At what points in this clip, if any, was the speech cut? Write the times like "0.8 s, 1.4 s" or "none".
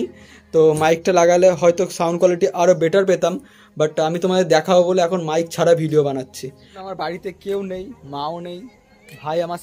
none